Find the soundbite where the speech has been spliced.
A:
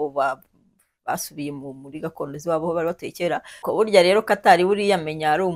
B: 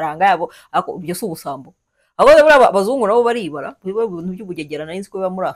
A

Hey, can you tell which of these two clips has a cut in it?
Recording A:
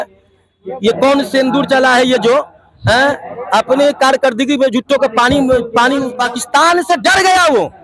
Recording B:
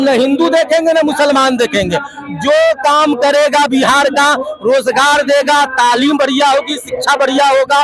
A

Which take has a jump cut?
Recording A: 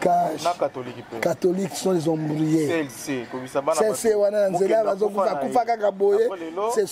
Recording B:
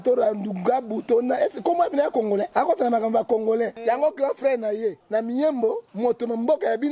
B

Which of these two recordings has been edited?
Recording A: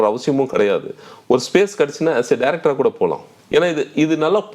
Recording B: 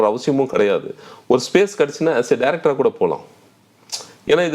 A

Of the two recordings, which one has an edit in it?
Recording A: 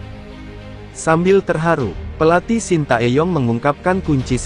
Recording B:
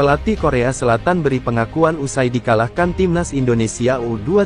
A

